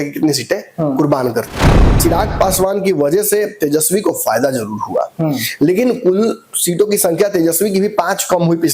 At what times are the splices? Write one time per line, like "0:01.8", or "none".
0:01.7